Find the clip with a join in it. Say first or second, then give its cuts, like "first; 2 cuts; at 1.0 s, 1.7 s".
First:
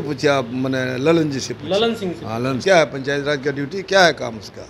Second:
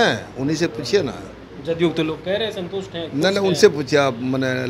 first; 1 cut; at 2.6 s